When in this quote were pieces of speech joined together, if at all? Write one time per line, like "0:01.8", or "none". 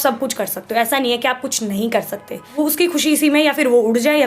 0:02.6